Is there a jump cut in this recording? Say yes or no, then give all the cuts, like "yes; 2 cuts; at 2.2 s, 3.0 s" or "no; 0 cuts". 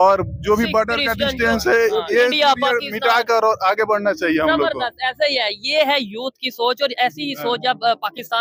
no; 0 cuts